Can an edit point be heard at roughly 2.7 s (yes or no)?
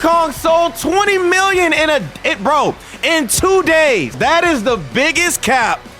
no